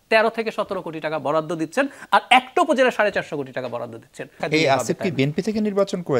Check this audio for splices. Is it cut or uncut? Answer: cut